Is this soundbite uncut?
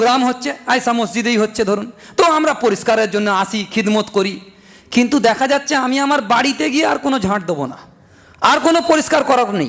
yes; 0 cuts

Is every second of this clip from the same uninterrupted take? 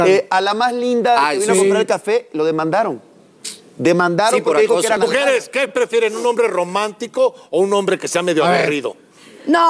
no; 1 cut; at 5.0 s

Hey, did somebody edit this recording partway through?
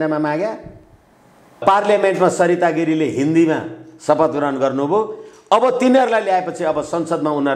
yes; 1 cut; at 1.6 s

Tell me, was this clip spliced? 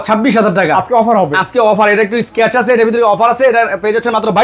no; 0 cuts

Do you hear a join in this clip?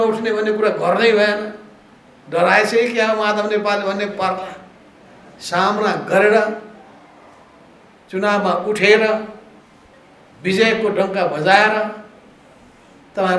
no; 0 cuts

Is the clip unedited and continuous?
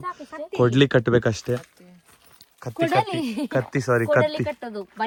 yes; 0 cuts

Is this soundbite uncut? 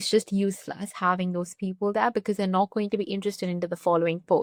yes; 0 cuts

